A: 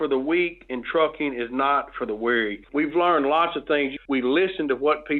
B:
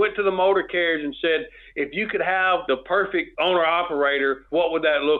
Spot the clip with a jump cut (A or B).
A